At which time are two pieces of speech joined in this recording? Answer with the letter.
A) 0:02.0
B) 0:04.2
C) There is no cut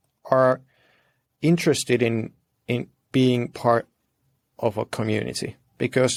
C